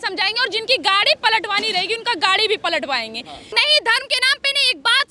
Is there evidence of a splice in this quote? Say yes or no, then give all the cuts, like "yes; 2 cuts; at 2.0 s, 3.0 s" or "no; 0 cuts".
yes; 1 cut; at 3.4 s